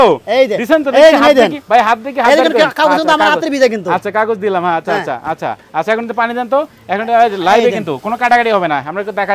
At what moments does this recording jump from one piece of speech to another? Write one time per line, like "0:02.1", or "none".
none